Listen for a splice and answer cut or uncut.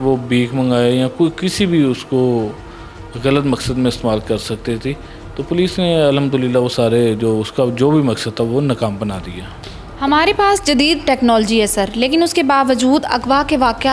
uncut